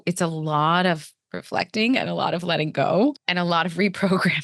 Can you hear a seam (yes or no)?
yes